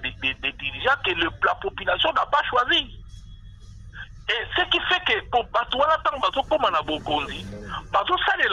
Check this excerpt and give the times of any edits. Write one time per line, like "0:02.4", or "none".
none